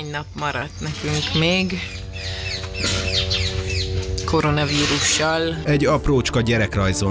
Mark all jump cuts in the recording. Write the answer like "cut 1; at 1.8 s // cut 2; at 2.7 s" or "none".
none